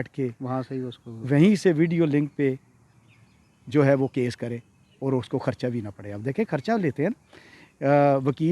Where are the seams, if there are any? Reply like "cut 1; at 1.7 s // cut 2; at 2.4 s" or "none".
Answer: none